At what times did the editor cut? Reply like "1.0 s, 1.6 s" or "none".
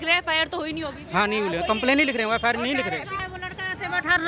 3.2 s